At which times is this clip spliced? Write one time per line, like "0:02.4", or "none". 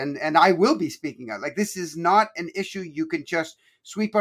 none